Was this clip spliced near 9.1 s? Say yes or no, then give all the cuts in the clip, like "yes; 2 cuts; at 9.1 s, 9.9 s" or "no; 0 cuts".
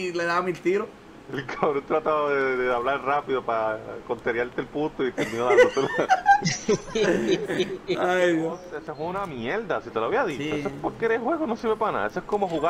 yes; 1 cut; at 9.1 s